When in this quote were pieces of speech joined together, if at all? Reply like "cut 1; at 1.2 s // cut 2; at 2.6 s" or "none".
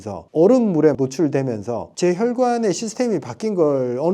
cut 1; at 1.8 s